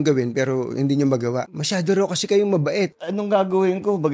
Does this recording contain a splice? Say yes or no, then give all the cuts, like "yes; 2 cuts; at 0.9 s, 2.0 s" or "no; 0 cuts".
yes; 2 cuts; at 1.5 s, 3.0 s